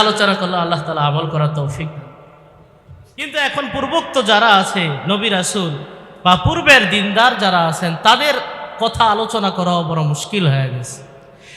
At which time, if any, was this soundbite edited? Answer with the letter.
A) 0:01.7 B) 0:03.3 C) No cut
B